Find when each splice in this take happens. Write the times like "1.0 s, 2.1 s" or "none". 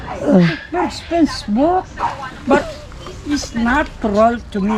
none

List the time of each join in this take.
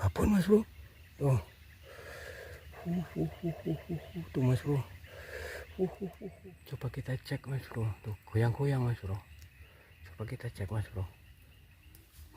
6.3 s

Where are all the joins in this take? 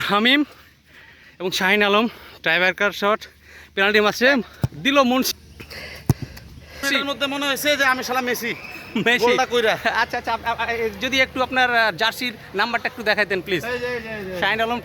5.4 s, 6.8 s

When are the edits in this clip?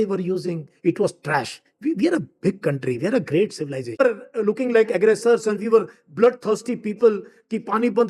4.0 s

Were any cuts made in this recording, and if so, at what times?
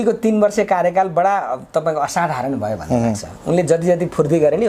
none

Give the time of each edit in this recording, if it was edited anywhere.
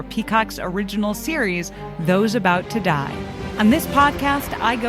3.4 s

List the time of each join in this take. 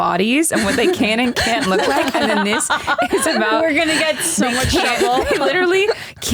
none

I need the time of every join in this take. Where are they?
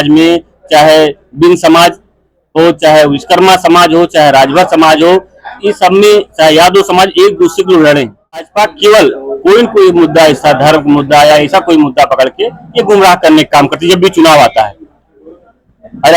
8.4 s

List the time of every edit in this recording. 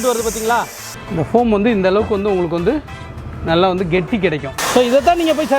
1.0 s, 4.6 s

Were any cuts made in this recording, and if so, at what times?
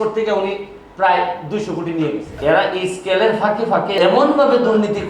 2.3 s, 3.9 s

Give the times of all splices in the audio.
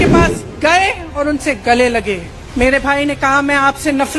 2.4 s

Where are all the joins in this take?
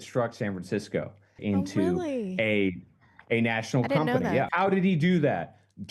1.3 s, 4.5 s

